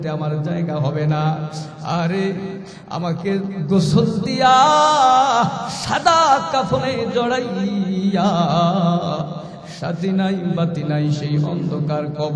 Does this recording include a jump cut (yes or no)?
no